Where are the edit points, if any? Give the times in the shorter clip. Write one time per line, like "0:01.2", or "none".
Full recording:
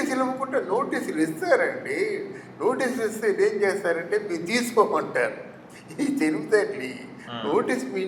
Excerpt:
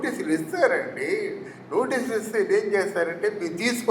none